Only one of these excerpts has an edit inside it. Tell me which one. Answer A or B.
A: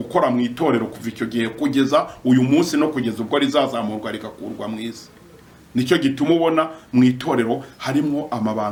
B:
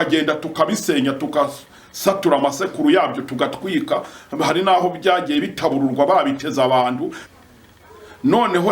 B